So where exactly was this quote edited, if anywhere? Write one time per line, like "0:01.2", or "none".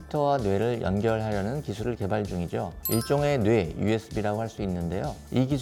none